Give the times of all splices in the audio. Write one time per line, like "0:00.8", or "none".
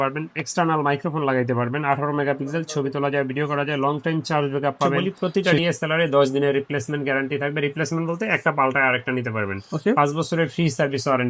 0:05.0

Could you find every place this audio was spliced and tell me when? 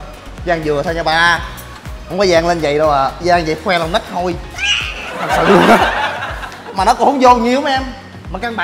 none

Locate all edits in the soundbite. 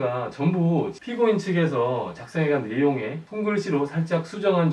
0:01.0

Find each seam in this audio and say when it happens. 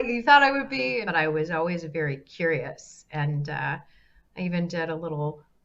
0:01.0

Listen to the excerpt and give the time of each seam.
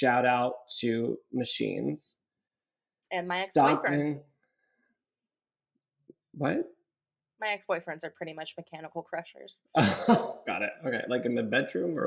none

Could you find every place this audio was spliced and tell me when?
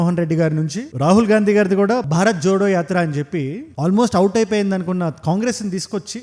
none

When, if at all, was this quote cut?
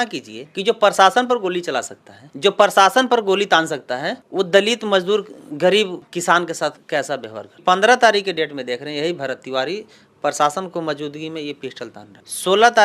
0:07.6

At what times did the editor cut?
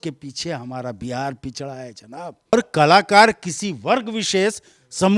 0:02.5

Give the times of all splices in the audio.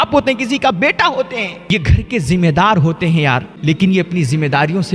0:01.6
0:03.5

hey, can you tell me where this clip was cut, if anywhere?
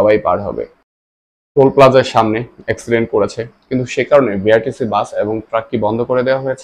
0:01.2

